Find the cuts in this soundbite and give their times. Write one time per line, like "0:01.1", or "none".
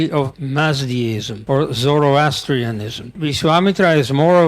0:01.3
0:03.2